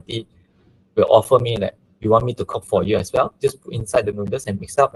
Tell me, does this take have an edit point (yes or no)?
no